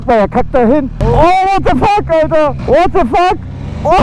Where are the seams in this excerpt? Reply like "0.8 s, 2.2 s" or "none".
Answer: 0.9 s, 2.6 s